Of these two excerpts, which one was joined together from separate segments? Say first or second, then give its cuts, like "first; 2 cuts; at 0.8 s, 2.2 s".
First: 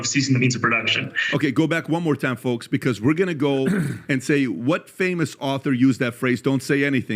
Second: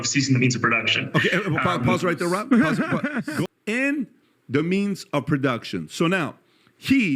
second; 2 cuts; at 1.0 s, 3.4 s